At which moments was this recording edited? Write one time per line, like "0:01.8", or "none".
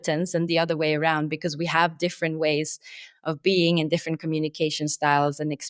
none